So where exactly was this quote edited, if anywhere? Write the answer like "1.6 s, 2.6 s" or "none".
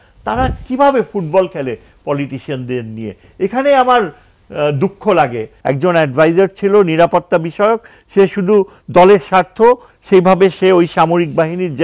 5.5 s